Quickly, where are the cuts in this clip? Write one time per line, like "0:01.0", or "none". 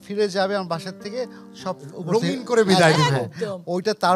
none